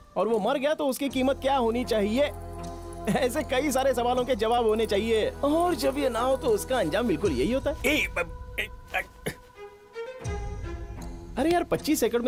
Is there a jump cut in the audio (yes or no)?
no